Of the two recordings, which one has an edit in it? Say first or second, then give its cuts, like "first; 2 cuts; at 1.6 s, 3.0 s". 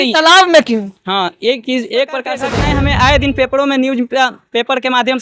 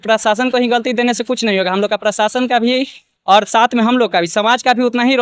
first; 1 cut; at 2.5 s